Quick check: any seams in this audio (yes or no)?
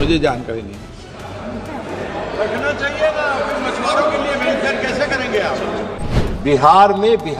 yes